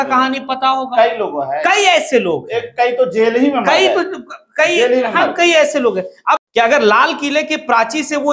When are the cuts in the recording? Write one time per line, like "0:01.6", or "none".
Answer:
0:06.4